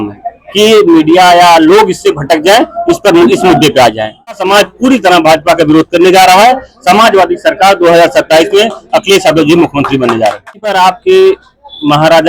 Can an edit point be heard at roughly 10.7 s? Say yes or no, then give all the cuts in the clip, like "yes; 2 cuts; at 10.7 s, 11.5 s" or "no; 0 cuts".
yes; 2 cuts; at 4.4 s, 10.7 s